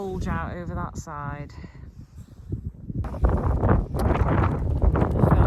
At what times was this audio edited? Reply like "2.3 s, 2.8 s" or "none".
3.0 s

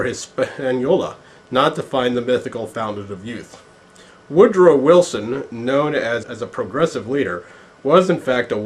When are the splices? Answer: 6.2 s

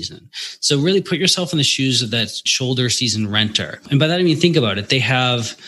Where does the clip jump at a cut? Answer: 2.4 s, 3.8 s

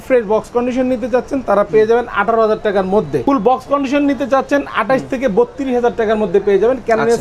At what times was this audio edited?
3.2 s

